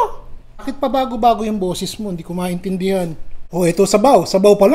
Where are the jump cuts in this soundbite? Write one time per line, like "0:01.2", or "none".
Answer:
0:03.5